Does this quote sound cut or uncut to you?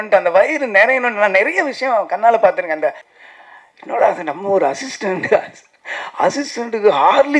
cut